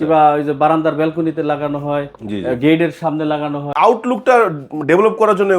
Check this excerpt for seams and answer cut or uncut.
cut